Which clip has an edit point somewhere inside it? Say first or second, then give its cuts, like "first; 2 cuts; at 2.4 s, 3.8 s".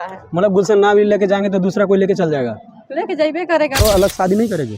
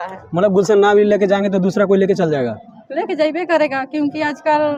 first; 1 cut; at 3.8 s